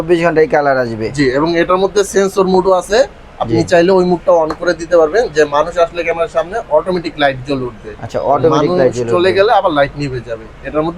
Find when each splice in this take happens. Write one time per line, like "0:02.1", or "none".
none